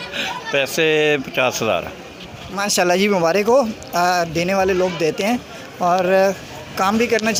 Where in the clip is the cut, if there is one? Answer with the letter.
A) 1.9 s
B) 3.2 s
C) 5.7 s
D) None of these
D